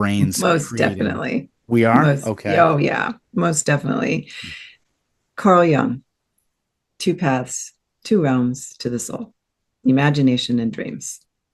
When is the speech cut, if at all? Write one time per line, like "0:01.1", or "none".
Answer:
none